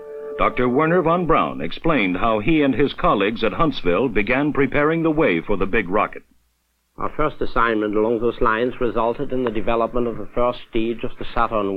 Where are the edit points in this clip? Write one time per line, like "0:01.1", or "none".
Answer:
0:02.4